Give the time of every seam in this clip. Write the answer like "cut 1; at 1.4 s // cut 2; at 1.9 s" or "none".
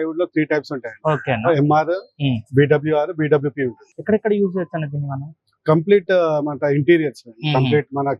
cut 1; at 3.8 s